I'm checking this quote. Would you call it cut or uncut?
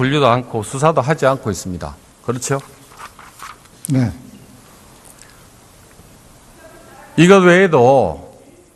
uncut